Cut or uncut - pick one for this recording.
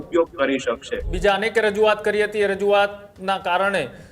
cut